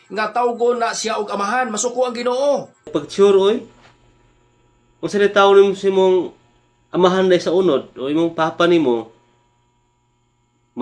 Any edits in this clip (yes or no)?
yes